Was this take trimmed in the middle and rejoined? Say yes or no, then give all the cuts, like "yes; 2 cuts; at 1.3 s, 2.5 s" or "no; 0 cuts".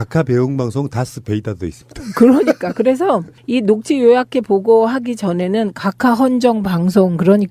yes; 1 cut; at 5.8 s